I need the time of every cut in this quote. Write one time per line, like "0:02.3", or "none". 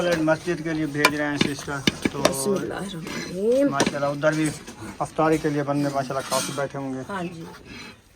none